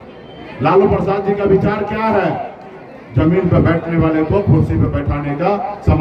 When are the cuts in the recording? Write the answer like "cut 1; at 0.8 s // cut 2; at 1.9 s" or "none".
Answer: none